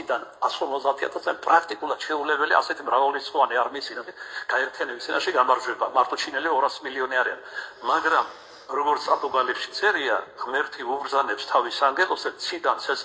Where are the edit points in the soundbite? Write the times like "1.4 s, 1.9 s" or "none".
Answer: 2.0 s